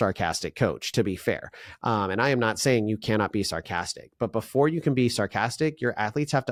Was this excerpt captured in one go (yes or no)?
yes